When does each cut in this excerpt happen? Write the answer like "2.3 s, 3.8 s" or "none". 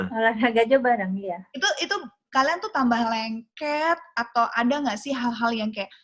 none